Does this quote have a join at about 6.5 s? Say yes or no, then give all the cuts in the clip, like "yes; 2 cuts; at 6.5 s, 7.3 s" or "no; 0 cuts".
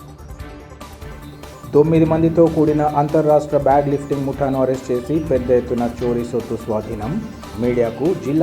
no; 1 cut; at 1.0 s